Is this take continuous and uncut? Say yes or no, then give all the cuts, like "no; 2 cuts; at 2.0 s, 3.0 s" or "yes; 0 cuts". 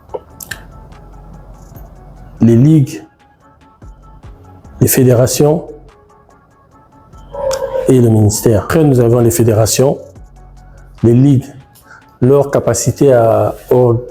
no; 1 cut; at 8.7 s